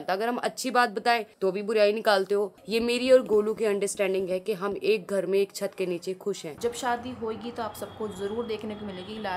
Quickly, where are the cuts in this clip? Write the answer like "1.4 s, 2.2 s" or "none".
2.6 s, 6.5 s